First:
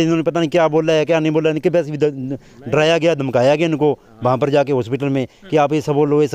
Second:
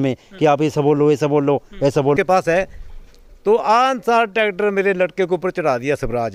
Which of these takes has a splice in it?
second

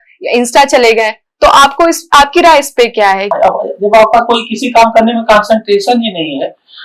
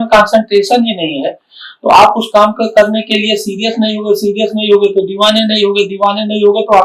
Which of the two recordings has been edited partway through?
first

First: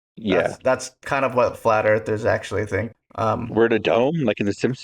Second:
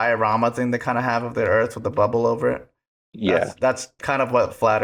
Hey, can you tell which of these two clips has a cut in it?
first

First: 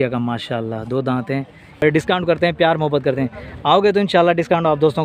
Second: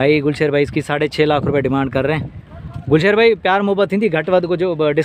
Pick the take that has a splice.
first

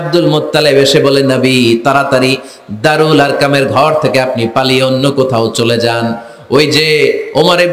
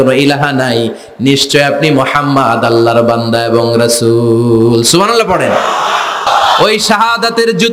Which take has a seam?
second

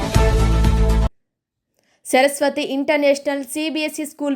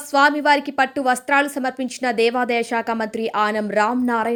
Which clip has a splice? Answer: first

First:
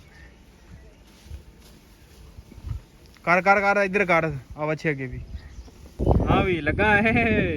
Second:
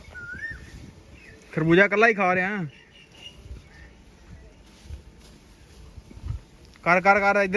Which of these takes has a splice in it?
first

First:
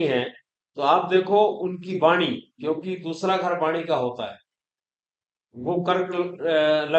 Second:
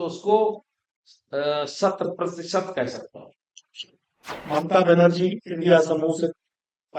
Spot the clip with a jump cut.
second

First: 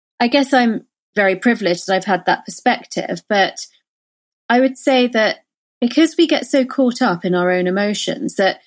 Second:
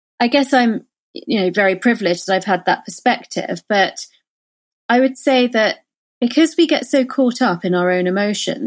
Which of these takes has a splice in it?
first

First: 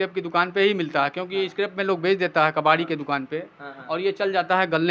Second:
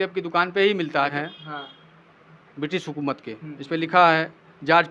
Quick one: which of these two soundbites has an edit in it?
second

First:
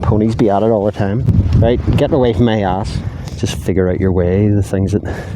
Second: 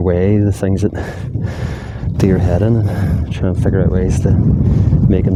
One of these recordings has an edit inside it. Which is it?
first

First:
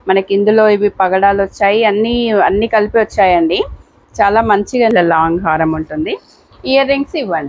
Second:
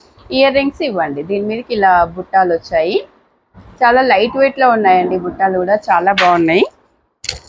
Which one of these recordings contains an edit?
first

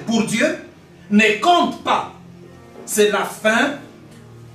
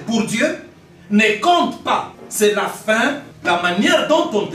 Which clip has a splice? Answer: second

